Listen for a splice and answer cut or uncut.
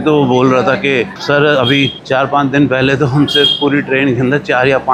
uncut